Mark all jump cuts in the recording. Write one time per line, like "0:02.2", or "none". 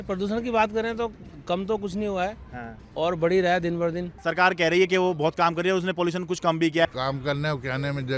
0:04.1
0:06.8